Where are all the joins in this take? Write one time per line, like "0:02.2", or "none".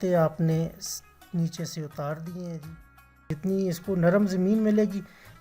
0:03.3